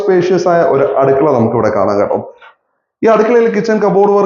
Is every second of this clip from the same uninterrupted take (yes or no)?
yes